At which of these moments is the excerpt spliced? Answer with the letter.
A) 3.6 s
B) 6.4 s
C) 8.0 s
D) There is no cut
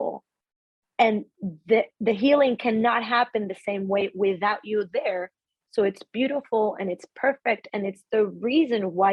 D